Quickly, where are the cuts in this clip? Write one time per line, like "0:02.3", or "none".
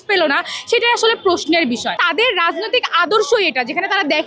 0:02.0